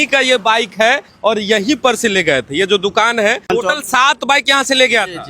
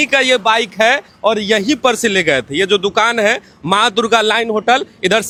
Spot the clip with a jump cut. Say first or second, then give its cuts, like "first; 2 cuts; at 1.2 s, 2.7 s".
first; 1 cut; at 3.5 s